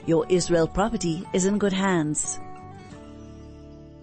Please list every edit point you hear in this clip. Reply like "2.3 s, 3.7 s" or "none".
2.2 s